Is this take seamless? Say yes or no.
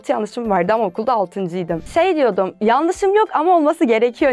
no